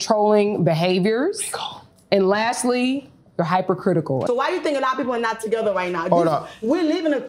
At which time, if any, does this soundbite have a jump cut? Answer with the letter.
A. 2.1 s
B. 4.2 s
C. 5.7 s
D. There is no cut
B